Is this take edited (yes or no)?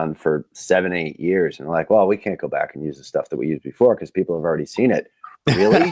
no